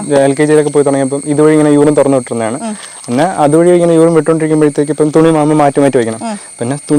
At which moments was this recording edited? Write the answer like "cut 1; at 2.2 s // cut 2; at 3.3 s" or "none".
none